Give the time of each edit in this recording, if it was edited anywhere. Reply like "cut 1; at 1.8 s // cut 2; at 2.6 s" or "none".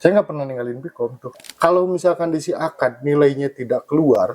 cut 1; at 1.4 s